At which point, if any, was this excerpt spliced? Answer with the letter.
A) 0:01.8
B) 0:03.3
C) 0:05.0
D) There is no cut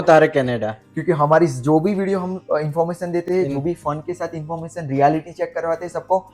D